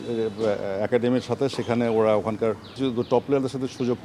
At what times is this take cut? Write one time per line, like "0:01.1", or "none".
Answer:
0:02.7